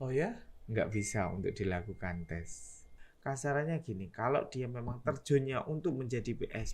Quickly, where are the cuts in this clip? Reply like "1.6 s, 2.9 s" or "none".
3.0 s